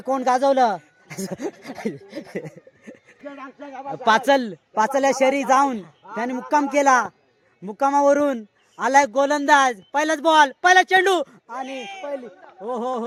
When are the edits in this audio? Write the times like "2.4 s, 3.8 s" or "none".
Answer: none